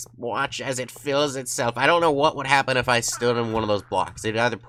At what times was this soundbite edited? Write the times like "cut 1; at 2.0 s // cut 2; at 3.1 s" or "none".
none